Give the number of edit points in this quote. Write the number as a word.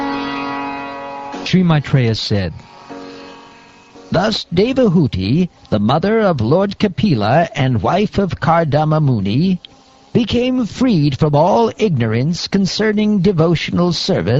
zero